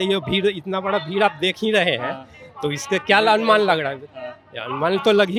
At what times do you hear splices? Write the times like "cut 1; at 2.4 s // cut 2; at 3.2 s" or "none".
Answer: none